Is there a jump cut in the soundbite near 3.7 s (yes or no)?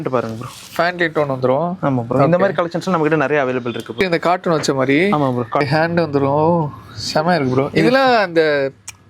no